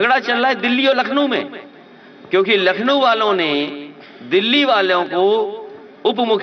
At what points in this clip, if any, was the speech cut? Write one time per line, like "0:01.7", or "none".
none